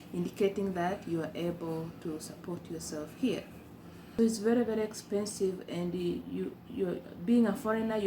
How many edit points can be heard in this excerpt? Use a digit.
1